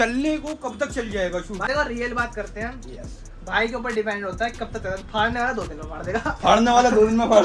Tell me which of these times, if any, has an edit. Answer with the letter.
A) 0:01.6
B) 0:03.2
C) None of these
A